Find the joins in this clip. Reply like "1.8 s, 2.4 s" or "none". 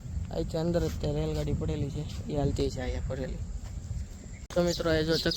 4.4 s